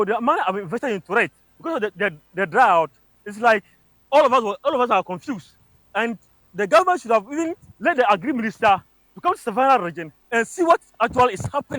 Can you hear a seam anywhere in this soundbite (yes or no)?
no